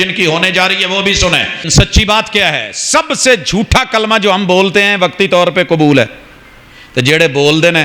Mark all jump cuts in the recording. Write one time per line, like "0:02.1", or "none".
0:01.7